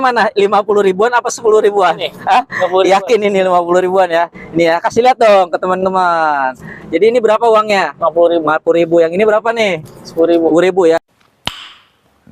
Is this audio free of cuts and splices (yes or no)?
no